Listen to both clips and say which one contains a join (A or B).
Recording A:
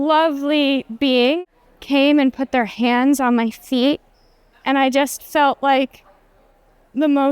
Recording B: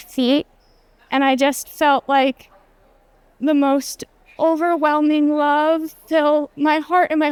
A